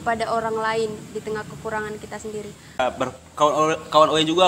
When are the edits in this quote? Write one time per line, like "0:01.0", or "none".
0:02.8